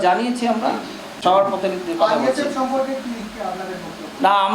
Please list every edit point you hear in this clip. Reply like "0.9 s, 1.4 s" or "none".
1.1 s